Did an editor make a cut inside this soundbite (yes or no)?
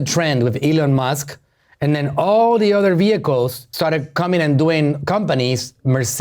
no